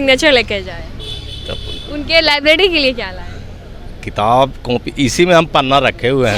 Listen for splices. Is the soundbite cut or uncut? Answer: uncut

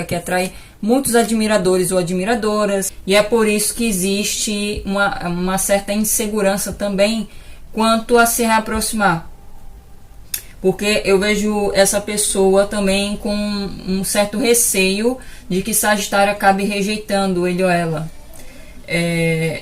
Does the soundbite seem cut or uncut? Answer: cut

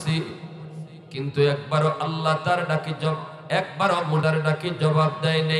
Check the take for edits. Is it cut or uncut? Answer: cut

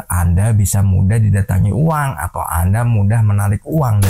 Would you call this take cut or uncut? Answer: uncut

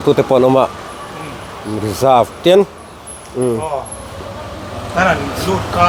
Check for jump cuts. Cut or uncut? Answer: uncut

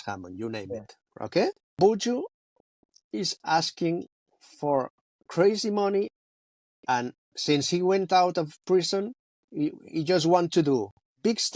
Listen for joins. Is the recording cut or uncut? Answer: uncut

